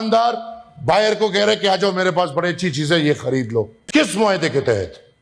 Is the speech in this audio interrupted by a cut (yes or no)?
no